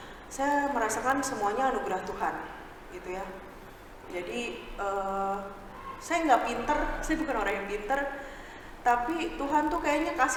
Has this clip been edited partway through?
no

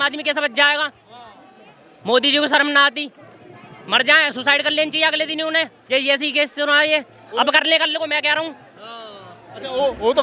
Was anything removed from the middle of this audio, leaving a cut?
no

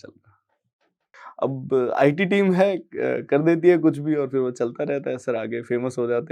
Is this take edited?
yes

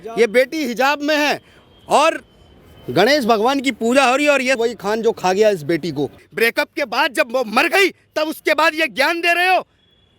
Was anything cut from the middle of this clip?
yes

